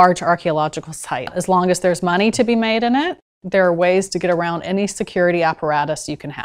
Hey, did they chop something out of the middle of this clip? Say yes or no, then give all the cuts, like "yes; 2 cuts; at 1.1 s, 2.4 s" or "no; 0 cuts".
yes; 1 cut; at 1.3 s